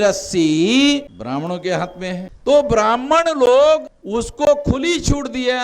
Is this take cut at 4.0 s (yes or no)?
yes